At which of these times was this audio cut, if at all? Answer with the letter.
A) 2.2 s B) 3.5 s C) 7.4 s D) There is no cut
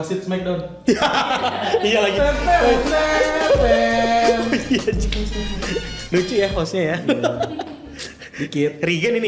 D